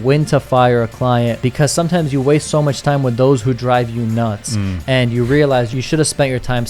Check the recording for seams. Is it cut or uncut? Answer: cut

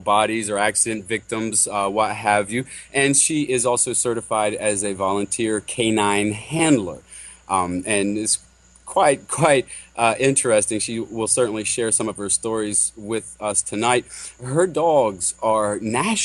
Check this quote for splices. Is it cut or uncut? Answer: cut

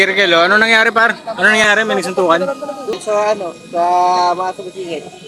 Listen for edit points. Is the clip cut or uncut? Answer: cut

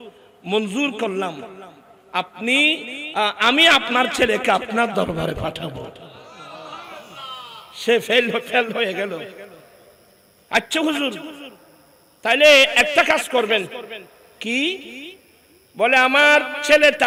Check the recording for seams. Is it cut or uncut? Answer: uncut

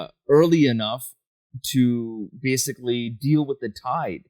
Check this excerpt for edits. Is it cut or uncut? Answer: uncut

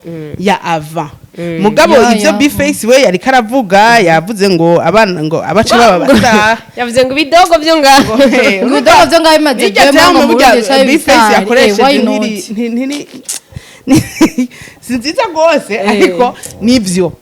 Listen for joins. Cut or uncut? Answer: uncut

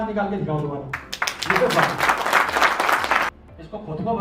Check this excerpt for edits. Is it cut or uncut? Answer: cut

